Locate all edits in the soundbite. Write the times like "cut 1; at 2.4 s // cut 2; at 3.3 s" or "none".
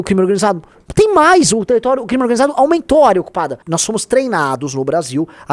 cut 1; at 3.5 s